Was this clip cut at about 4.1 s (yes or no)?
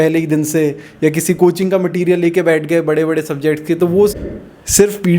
yes